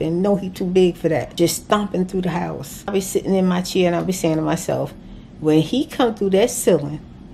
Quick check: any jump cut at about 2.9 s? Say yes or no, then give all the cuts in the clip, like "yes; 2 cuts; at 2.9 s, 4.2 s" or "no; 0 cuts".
yes; 2 cuts; at 1.3 s, 2.9 s